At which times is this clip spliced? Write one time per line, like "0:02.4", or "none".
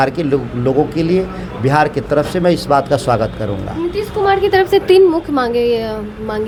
none